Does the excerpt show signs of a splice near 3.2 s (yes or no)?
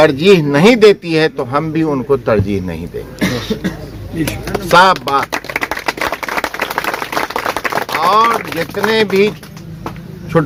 no